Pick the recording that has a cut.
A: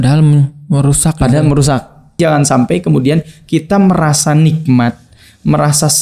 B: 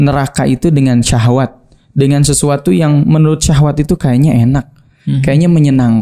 A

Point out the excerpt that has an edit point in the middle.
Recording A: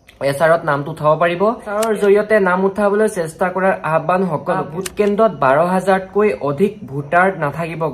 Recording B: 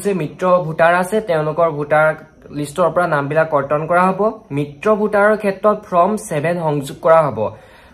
A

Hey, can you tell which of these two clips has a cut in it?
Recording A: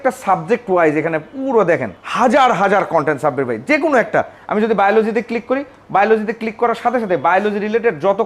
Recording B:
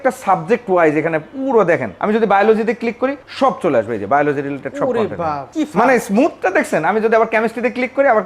B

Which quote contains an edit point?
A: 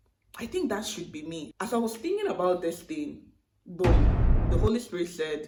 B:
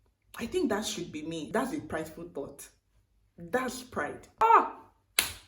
B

